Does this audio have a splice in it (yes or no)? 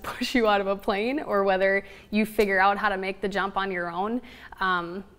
no